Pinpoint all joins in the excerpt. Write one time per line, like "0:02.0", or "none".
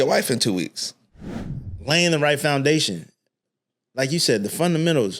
0:01.1